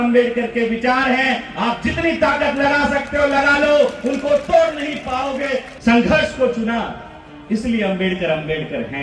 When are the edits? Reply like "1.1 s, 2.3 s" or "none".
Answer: 5.7 s